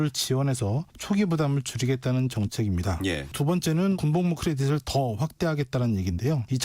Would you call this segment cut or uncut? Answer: cut